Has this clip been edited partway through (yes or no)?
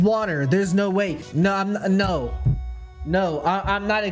yes